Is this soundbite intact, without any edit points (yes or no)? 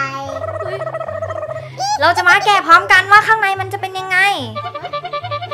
yes